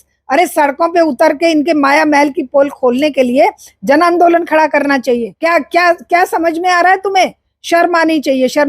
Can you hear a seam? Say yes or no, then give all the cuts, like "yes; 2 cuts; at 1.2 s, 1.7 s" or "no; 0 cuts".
yes; 1 cut; at 5.3 s